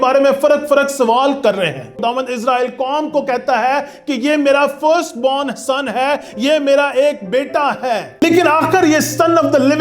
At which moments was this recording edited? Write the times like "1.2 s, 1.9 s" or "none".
2.0 s, 8.2 s